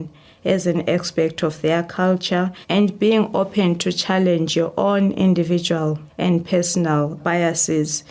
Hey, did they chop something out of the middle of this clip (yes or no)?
yes